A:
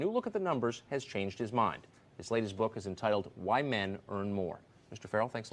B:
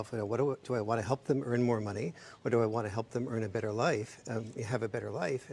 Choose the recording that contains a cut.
A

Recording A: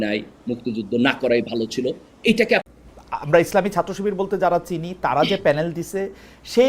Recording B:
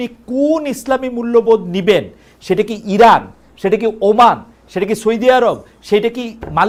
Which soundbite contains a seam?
A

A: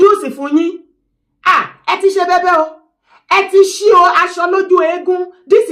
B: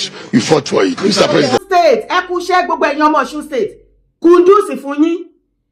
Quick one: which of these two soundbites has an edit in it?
B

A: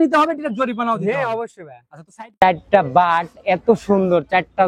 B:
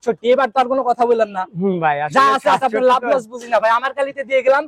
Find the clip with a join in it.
A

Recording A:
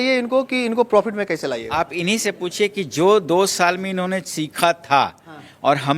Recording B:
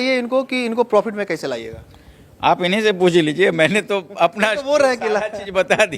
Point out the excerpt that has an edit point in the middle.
A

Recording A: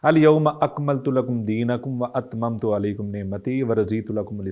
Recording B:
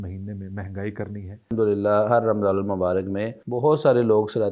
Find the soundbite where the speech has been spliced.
B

